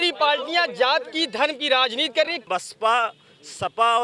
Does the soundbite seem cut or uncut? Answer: cut